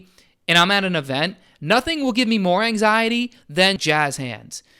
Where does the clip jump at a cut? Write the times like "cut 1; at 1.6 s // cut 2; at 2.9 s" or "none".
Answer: cut 1; at 3.8 s